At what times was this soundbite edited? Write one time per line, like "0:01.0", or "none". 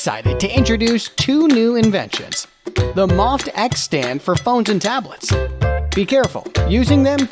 none